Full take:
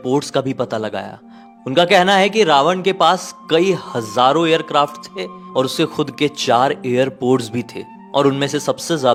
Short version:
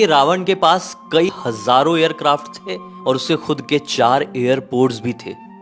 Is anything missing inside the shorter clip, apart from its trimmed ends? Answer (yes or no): yes